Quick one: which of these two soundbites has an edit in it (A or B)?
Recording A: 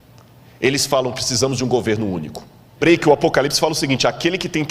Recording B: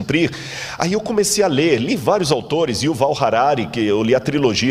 A